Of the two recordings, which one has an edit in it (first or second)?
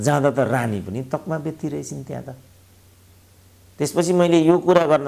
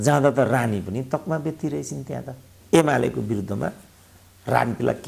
second